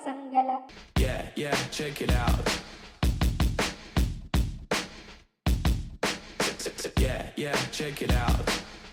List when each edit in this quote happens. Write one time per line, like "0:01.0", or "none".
none